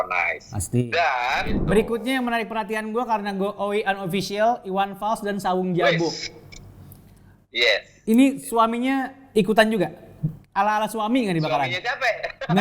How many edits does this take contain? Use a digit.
1